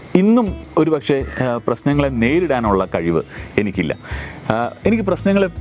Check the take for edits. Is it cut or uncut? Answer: uncut